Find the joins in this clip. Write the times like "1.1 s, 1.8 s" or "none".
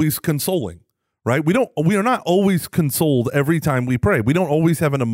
none